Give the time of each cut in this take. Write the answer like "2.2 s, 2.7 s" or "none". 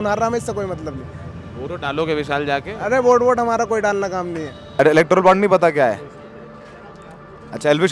4.6 s